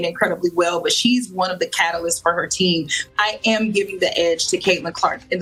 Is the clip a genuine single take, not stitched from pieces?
yes; 0 cuts

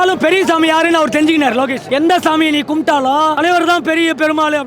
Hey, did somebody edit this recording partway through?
yes; 2 cuts; at 1.8 s, 3.4 s

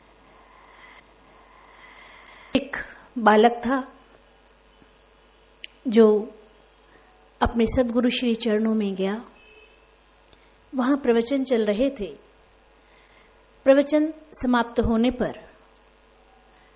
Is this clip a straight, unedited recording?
yes; 0 cuts

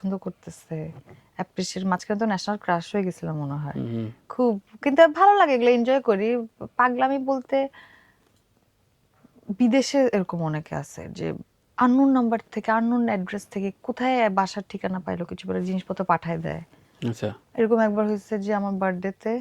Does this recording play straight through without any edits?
yes; 0 cuts

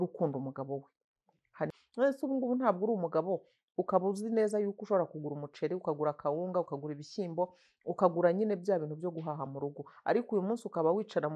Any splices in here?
yes; 1 cut; at 1.7 s

